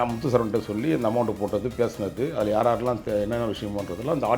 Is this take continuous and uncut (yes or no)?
yes